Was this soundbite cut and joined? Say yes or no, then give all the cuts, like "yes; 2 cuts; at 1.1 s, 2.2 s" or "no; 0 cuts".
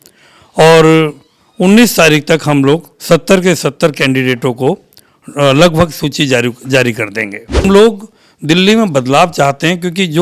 yes; 1 cut; at 7.6 s